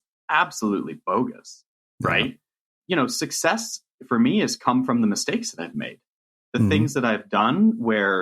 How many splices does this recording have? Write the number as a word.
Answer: one